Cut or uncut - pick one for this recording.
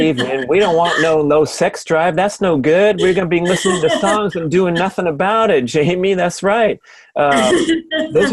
uncut